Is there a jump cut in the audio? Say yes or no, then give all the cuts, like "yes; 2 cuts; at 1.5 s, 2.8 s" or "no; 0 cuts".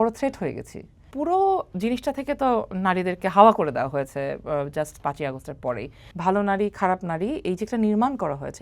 yes; 2 cuts; at 1.1 s, 6.0 s